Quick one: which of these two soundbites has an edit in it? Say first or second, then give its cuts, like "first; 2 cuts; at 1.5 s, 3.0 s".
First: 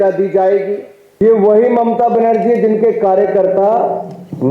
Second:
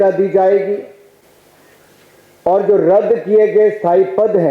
first; 1 cut; at 1.2 s